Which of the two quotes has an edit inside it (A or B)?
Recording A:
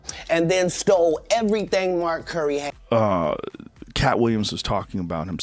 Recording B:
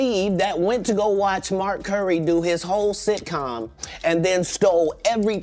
A